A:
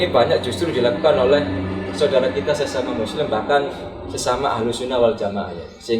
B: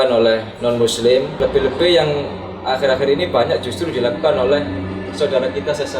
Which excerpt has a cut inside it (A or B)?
B